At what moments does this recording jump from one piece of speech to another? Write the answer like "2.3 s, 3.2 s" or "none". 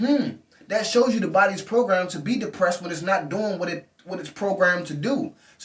none

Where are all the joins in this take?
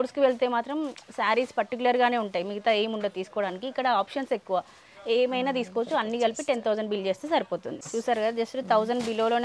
7.8 s

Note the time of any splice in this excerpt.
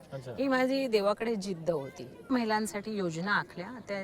2.3 s

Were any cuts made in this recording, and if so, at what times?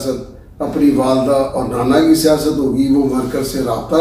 none

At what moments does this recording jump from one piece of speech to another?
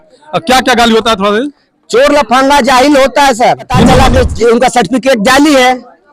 3.9 s

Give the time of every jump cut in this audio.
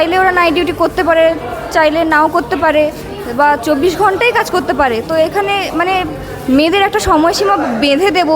none

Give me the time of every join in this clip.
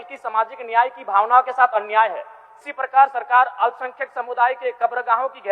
2.4 s

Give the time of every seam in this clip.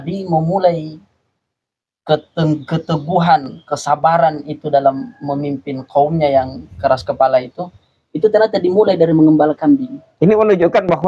10.0 s

